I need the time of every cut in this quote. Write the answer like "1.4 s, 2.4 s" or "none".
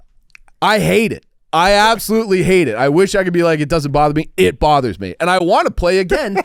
none